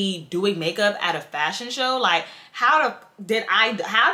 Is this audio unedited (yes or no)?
yes